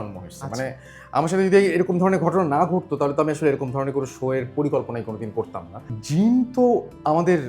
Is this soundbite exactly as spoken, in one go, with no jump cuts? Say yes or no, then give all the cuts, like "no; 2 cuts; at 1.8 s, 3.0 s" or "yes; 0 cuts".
no; 1 cut; at 5.9 s